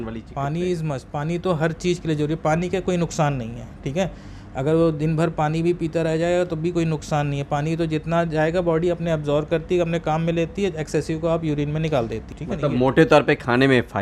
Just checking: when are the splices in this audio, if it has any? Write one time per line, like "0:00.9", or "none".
none